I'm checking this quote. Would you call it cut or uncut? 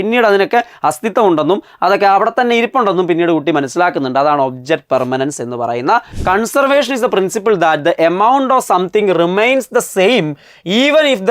cut